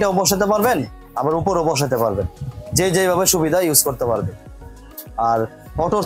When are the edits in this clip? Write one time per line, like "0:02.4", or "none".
none